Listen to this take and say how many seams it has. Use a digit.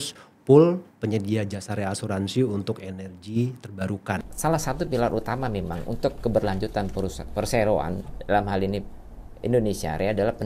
1